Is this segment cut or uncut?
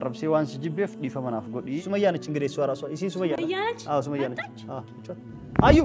cut